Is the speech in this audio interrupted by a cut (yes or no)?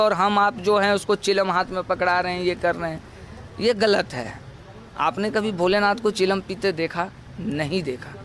no